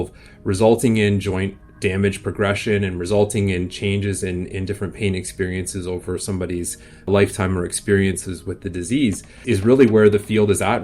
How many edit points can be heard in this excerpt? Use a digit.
2